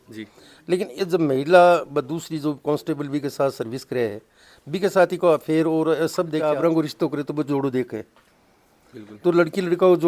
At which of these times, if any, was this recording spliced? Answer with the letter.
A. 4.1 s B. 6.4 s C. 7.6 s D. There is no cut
B